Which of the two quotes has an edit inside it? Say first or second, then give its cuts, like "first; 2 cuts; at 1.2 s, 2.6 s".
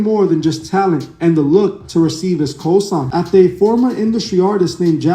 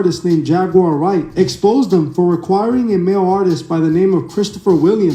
first; 1 cut; at 3.1 s